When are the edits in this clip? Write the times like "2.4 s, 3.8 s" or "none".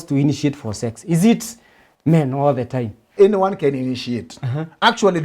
3.1 s